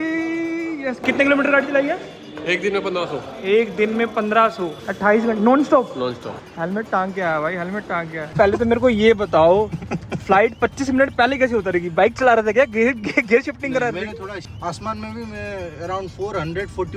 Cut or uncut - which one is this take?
cut